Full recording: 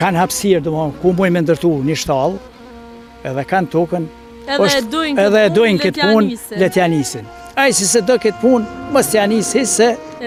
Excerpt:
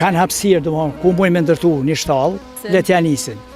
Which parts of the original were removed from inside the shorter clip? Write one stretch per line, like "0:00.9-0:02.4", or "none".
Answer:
0:02.6-0:06.4